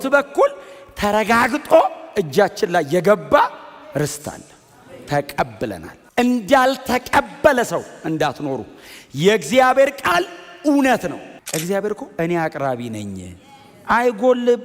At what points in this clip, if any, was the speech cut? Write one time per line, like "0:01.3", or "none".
0:05.9
0:11.2